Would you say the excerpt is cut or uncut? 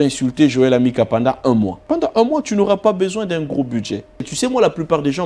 cut